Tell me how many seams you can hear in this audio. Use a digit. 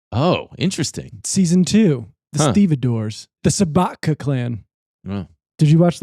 1